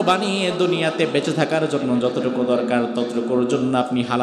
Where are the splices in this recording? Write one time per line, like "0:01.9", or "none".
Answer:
none